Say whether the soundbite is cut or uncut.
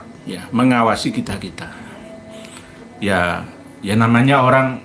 uncut